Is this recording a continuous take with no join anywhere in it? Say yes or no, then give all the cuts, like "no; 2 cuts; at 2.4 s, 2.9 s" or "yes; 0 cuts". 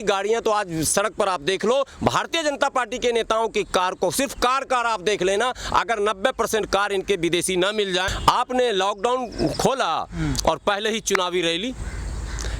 no; 1 cut; at 8.1 s